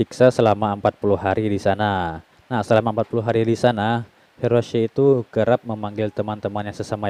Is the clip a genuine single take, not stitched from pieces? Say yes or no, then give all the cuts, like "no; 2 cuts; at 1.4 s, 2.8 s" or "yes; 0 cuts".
yes; 0 cuts